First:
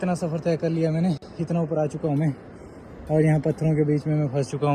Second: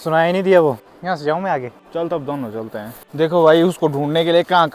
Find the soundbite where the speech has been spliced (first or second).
second